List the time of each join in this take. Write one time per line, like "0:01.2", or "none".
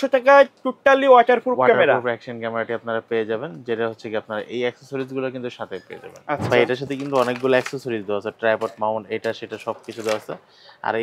0:06.5